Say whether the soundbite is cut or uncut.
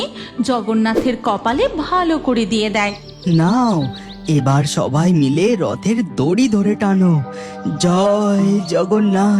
cut